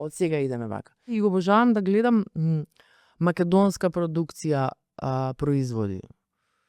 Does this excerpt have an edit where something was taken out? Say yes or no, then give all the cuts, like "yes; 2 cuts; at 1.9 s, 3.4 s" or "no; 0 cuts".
yes; 1 cut; at 1.1 s